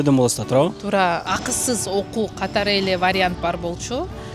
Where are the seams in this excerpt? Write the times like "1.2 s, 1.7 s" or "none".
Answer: 1.2 s